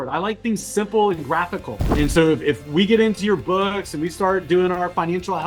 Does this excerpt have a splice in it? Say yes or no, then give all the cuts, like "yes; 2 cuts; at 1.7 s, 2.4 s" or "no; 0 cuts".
yes; 1 cut; at 1.8 s